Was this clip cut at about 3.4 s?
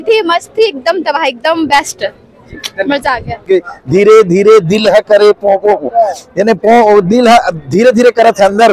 yes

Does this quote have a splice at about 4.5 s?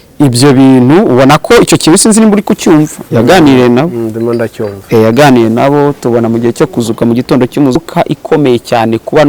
no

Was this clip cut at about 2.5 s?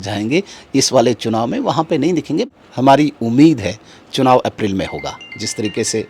yes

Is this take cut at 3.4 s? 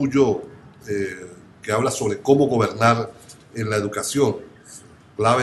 yes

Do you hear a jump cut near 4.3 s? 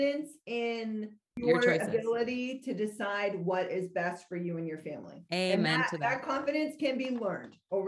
no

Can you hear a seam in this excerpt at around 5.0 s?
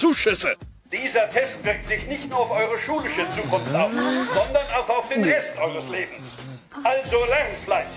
no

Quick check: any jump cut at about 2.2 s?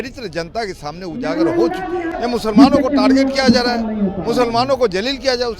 yes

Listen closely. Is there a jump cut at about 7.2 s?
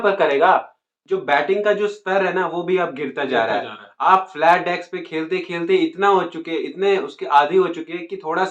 no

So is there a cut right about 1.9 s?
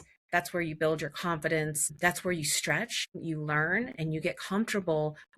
yes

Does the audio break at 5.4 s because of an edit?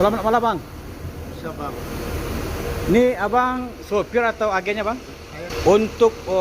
yes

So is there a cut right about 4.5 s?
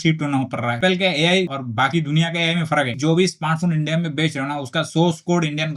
no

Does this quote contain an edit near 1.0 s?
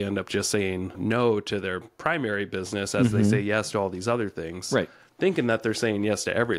yes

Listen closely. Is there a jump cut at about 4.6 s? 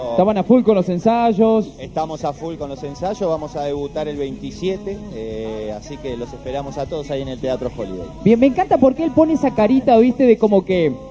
yes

